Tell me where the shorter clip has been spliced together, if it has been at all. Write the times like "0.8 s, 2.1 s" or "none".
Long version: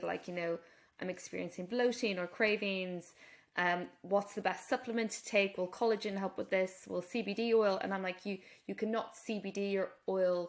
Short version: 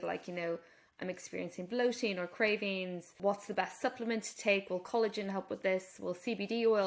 3.1 s